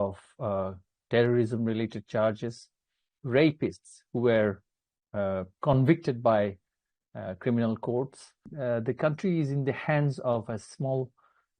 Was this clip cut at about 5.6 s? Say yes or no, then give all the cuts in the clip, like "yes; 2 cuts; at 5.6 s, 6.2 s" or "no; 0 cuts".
no; 1 cut; at 8.5 s